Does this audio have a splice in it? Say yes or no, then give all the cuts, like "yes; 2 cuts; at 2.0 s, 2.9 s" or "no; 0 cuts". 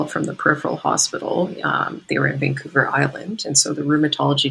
no; 0 cuts